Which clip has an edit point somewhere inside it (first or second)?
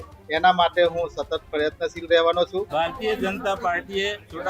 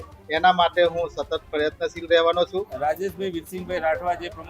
second